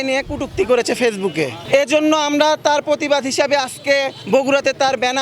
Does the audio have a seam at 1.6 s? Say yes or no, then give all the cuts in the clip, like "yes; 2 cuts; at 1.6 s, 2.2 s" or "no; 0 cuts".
yes; 2 cuts; at 1.6 s, 4.2 s